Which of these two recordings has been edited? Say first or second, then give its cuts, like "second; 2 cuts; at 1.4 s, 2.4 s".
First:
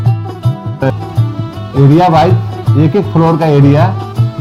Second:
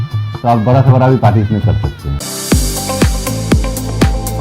second; 1 cut; at 2.2 s